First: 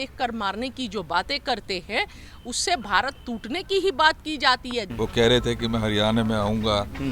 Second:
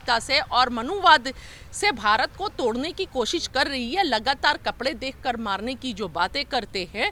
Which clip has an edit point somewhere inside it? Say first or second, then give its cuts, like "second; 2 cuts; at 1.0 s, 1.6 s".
first; 1 cut; at 4.9 s